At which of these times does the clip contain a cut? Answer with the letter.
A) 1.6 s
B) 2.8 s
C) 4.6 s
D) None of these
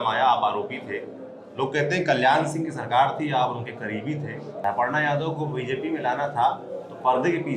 C